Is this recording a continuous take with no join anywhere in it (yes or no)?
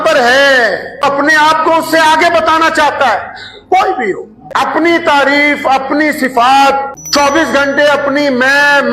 no